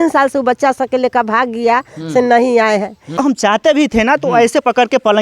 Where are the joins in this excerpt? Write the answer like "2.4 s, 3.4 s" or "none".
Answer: 3.2 s